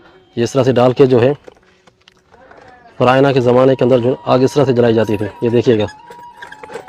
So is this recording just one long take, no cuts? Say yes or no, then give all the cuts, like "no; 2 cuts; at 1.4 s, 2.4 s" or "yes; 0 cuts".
yes; 0 cuts